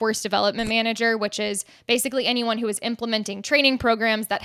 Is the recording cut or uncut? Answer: uncut